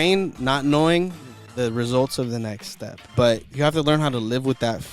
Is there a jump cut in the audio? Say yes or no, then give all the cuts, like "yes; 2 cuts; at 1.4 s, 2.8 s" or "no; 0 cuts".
yes; 1 cut; at 3.1 s